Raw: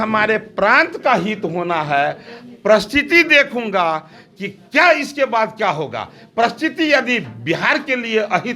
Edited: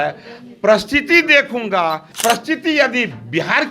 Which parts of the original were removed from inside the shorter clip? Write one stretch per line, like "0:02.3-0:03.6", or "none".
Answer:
0:04.1-0:06.2